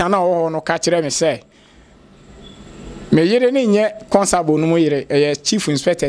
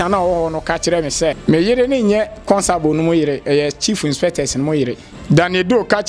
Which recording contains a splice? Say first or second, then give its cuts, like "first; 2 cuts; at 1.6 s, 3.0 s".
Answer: second; 2 cuts; at 1.4 s, 5.1 s